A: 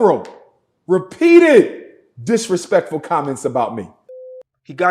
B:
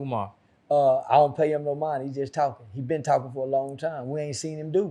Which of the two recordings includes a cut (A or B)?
A